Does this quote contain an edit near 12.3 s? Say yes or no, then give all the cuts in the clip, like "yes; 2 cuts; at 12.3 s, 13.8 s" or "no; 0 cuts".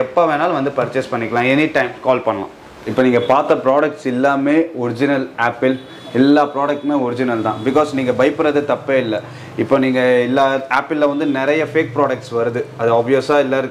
no; 1 cut; at 2.8 s